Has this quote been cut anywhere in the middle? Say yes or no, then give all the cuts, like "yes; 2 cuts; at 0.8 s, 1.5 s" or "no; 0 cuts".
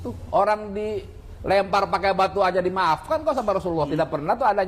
no; 0 cuts